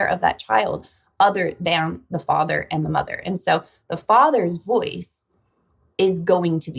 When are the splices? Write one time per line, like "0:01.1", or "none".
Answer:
none